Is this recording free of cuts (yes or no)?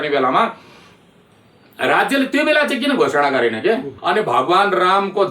no